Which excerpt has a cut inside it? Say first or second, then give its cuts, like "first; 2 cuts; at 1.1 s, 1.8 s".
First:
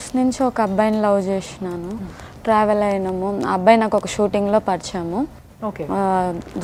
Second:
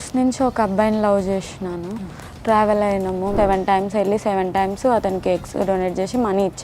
second; 1 cut; at 3.3 s